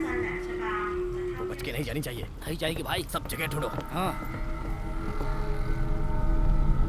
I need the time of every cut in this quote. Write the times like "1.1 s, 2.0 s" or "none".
1.5 s

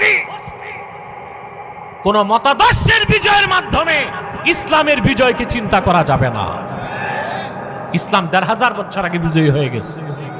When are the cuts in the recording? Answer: none

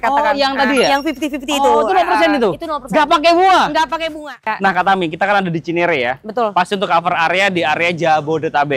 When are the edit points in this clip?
none

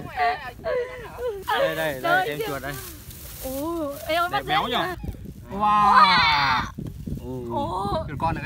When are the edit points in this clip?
1.4 s, 5.0 s

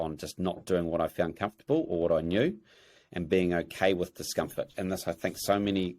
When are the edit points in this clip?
4.7 s

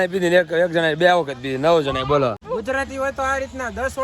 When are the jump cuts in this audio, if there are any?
2.4 s

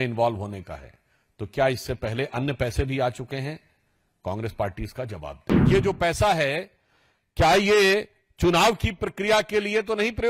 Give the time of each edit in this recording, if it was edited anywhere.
5.5 s

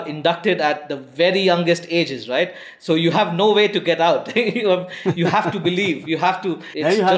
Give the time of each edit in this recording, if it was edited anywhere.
none

